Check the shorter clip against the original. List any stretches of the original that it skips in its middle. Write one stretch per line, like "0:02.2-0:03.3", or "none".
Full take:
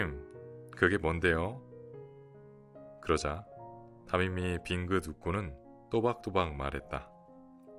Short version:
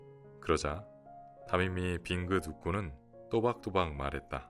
none